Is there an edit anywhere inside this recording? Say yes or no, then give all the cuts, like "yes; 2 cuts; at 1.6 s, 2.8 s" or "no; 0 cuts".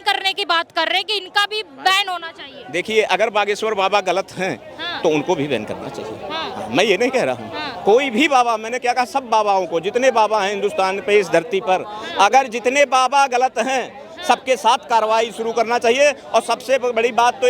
no; 0 cuts